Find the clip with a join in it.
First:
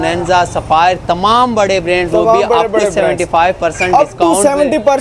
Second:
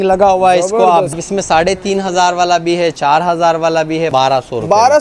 second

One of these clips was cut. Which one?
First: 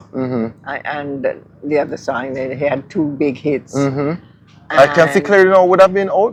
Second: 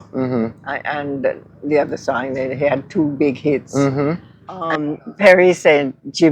second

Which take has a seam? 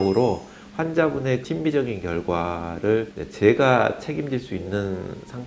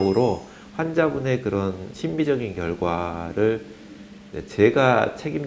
first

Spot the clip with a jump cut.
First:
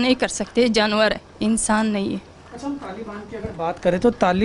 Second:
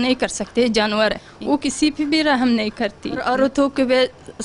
second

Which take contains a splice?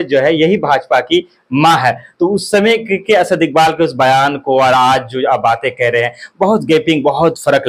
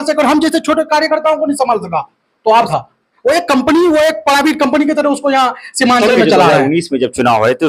second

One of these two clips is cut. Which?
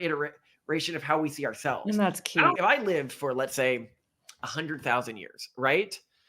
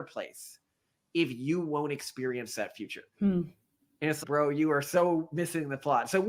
first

